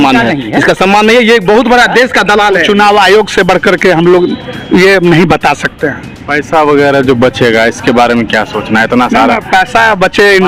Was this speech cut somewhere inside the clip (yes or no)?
yes